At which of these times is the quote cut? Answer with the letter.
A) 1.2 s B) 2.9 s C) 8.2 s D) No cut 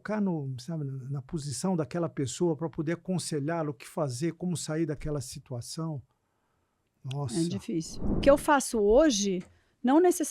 C